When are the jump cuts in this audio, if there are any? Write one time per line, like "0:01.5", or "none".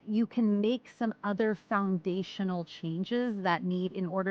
none